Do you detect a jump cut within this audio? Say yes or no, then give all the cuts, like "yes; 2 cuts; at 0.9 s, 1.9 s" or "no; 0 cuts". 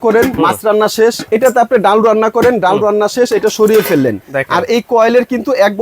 yes; 2 cuts; at 1.2 s, 4.2 s